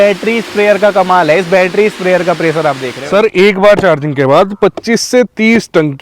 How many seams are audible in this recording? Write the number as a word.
one